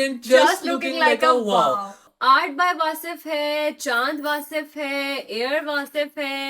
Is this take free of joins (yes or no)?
no